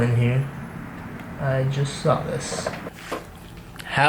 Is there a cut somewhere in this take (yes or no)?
yes